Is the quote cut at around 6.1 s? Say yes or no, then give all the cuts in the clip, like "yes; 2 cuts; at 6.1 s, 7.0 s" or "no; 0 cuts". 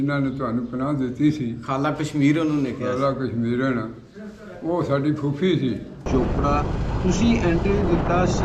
yes; 1 cut; at 6.1 s